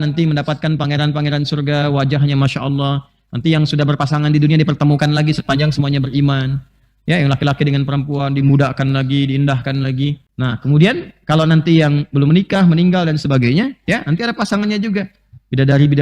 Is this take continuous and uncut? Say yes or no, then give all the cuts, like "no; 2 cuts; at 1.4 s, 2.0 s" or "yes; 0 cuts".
no; 1 cut; at 10.3 s